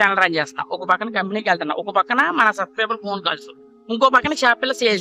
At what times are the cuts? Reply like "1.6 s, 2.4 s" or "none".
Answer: none